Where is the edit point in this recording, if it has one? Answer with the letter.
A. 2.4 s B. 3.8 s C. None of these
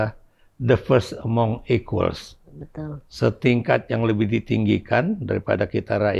C